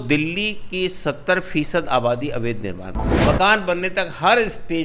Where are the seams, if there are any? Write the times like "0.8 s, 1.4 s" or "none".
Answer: 3.0 s